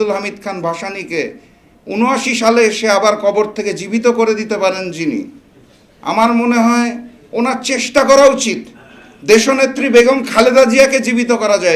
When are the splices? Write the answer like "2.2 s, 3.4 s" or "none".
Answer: none